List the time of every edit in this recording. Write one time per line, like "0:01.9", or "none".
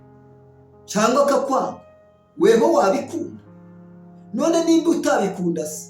0:00.9